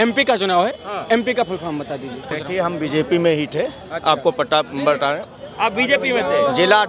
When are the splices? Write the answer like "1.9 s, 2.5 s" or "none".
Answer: 2.3 s